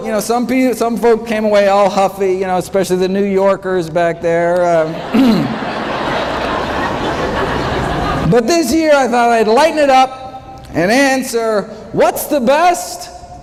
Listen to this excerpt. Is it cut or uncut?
uncut